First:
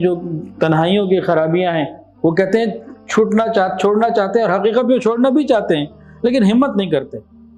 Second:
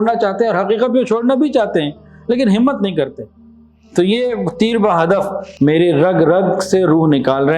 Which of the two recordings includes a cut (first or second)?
second